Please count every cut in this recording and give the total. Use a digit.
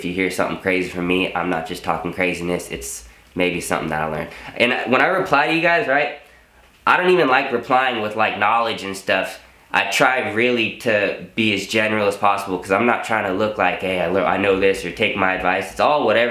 0